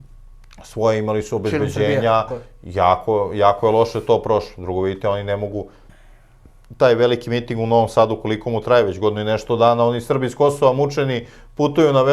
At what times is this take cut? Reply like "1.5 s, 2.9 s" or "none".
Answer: none